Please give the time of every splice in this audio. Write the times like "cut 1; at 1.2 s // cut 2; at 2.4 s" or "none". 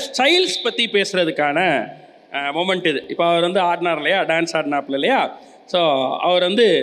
none